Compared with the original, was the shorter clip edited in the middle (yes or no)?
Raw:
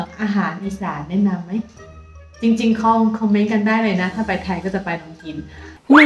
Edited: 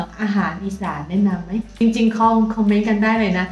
yes